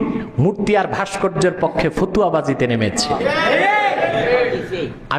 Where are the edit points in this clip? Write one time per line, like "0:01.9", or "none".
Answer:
none